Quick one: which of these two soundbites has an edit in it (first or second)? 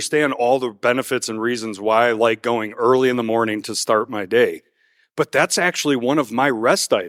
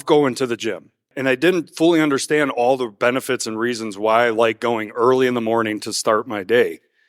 second